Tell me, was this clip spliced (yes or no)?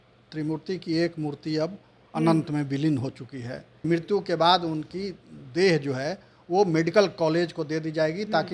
yes